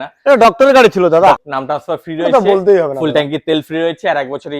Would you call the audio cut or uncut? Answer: cut